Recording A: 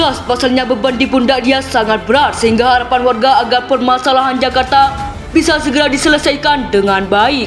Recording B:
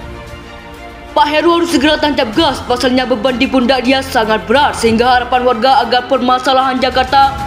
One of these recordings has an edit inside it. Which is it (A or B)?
B